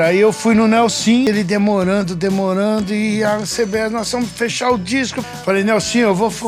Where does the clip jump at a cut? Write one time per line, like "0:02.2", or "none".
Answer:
0:01.3
0:05.2